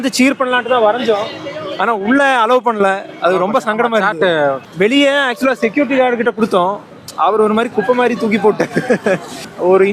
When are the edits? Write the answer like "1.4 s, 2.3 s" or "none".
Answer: none